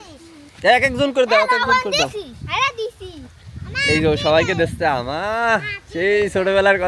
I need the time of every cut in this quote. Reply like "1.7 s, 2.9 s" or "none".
none

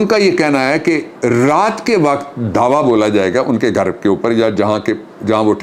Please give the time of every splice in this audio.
none

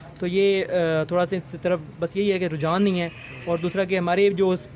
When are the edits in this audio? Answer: none

